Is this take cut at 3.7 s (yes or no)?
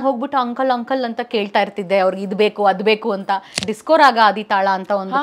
yes